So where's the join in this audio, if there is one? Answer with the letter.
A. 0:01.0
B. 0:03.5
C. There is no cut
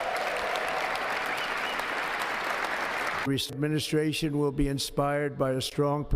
B